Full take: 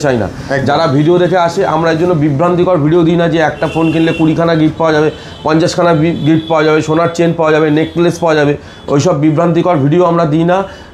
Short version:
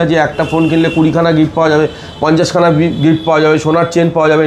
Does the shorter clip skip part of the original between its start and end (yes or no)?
no